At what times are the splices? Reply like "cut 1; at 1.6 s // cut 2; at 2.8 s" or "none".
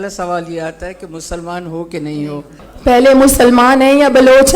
cut 1; at 2.7 s